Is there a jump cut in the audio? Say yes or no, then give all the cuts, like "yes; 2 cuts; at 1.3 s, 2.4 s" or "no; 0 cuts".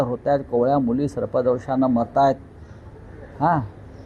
no; 0 cuts